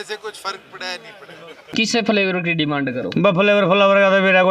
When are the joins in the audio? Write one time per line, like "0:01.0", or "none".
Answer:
0:01.7